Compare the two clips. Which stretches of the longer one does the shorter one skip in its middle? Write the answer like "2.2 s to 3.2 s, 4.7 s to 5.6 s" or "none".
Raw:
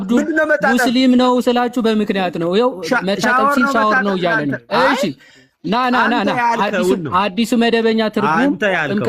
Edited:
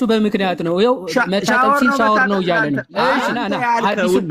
5.1 s to 6.1 s